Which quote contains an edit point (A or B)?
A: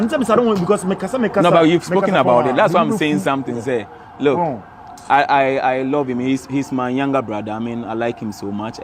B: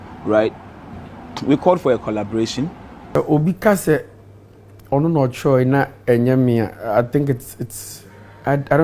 B